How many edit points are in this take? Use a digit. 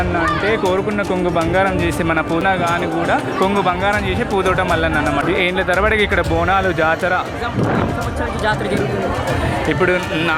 3